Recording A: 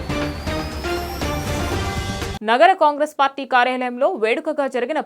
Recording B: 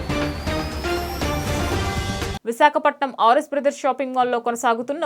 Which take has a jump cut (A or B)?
B